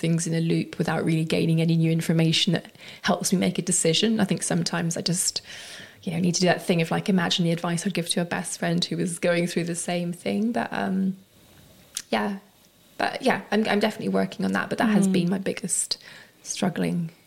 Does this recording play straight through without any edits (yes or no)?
yes